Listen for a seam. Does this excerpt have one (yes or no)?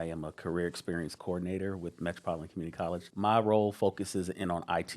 yes